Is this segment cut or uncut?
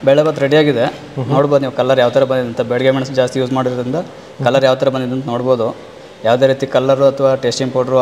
uncut